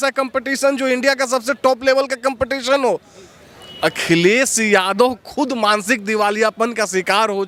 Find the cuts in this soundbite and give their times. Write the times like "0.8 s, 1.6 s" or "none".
none